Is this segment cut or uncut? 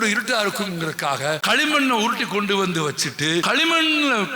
cut